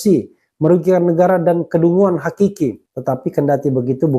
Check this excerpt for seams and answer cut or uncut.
cut